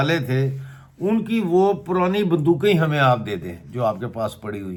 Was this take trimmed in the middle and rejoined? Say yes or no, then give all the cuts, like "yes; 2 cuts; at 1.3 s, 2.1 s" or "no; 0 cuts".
no; 0 cuts